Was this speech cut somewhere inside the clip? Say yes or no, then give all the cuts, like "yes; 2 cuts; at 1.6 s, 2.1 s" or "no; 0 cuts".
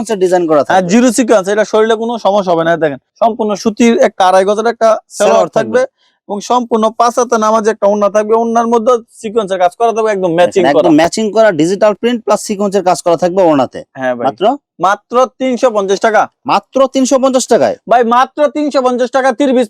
no; 0 cuts